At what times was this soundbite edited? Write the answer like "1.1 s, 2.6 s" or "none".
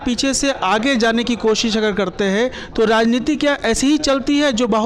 none